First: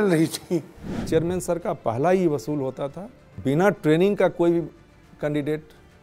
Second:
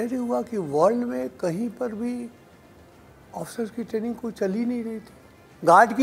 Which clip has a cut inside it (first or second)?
first